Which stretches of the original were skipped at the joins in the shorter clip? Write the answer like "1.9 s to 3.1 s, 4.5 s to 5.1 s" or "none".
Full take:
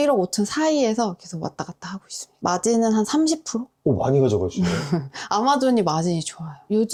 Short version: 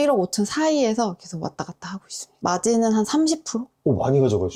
none